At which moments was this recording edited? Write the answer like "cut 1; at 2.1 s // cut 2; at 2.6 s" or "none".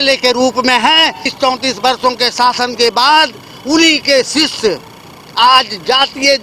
cut 1; at 1.2 s